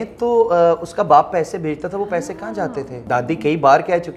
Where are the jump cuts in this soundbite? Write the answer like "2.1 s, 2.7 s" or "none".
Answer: 3.0 s